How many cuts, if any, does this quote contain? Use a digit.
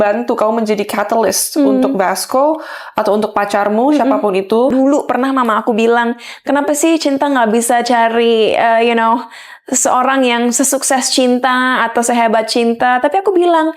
1